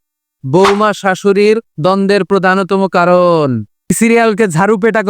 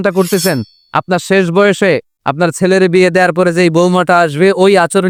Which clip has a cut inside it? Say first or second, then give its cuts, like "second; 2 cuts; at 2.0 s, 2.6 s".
first; 2 cuts; at 1.8 s, 4.0 s